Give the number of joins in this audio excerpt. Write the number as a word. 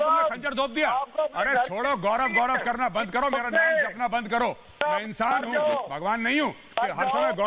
zero